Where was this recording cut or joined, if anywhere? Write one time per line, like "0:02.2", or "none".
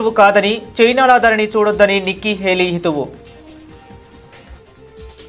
0:03.2